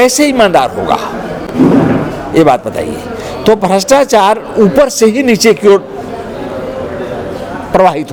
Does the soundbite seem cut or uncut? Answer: uncut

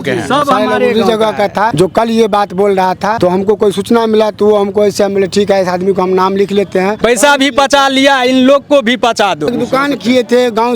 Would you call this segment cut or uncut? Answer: cut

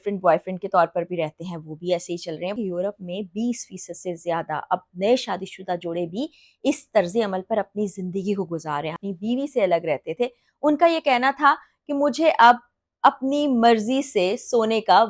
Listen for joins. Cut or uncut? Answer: cut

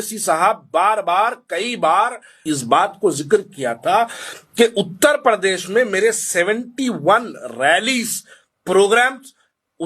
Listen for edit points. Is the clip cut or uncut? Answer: cut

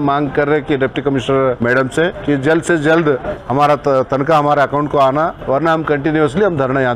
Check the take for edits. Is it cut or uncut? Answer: cut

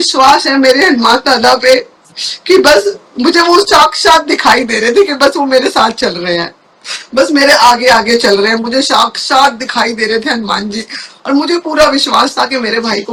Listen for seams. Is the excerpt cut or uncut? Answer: uncut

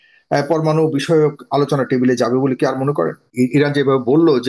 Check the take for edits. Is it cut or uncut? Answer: cut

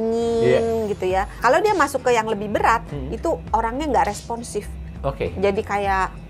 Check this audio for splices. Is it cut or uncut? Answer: cut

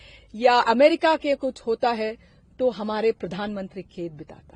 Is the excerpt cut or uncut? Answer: uncut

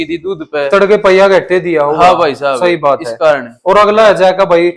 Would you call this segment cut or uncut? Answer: uncut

